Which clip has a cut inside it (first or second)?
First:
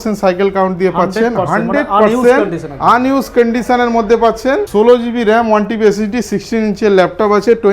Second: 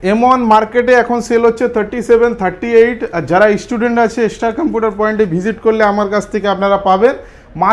first